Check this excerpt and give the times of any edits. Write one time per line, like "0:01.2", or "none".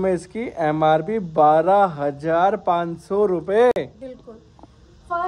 none